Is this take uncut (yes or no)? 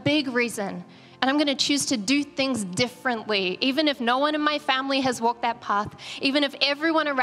yes